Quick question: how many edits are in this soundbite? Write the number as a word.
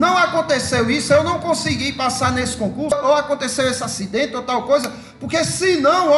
one